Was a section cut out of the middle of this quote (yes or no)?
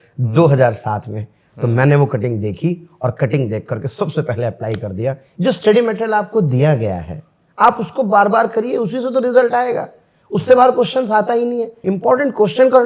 yes